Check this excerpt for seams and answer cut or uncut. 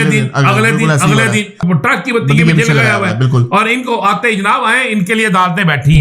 cut